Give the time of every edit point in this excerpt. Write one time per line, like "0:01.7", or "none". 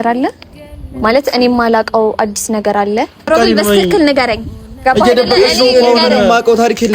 0:03.3